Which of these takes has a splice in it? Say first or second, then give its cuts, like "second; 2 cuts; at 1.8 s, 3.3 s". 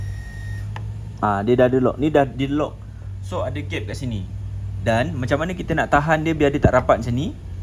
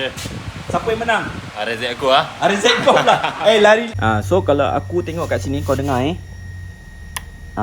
second; 1 cut; at 3.9 s